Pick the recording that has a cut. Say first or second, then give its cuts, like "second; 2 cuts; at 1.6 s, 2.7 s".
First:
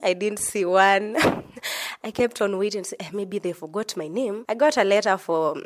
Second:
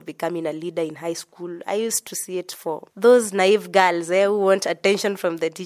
first; 1 cut; at 4.4 s